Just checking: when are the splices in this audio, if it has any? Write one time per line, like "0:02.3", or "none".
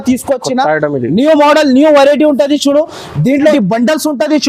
0:03.5